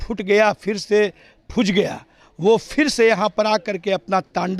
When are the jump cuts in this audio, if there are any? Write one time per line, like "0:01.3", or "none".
none